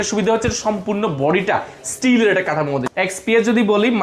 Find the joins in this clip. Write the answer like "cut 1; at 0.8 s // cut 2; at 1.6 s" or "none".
cut 1; at 2.9 s

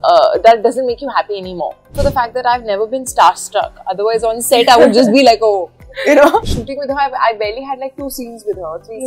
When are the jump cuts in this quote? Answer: cut 1; at 2.0 s // cut 2; at 6.5 s

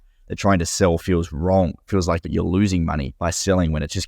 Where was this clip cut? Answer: cut 1; at 1.0 s // cut 2; at 2.2 s // cut 3; at 3.1 s

